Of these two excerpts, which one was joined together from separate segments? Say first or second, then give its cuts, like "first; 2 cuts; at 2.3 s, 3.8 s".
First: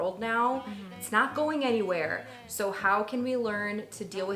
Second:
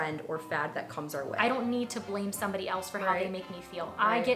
second; 1 cut; at 1.3 s